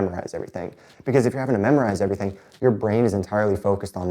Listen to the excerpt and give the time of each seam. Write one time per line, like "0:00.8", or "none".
none